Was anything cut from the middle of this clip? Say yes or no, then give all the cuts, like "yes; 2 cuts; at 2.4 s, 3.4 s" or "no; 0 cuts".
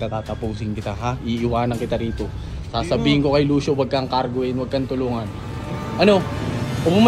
no; 0 cuts